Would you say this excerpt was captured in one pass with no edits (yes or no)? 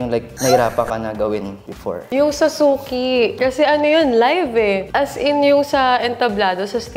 no